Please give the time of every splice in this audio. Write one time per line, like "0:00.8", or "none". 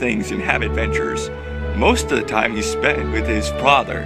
0:03.1

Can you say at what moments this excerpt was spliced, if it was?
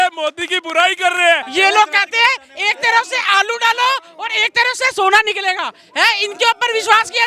0:01.5

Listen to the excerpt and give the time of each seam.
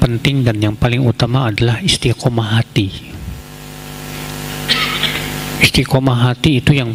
none

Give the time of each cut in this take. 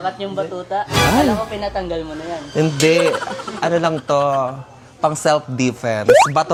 none

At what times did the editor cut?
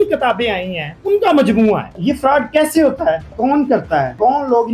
0:01.9

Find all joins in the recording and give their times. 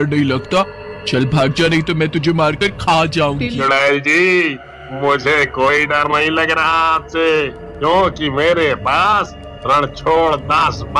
0:03.6

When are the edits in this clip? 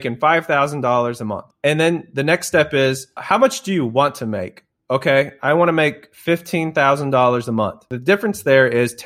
0:01.5
0:03.2
0:07.9

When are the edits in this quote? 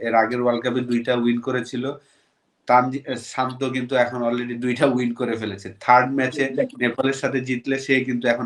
none

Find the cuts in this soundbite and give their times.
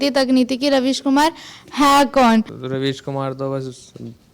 0:02.6

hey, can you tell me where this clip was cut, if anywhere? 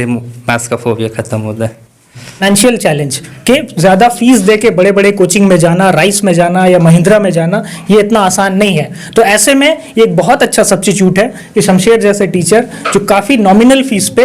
0:02.4

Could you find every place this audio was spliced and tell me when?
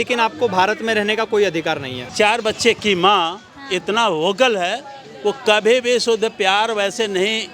0:02.0

